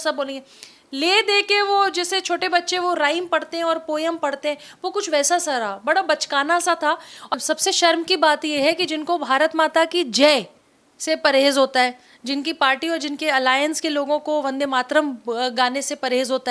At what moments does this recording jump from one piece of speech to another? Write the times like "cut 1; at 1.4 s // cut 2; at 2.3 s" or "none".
cut 1; at 7.3 s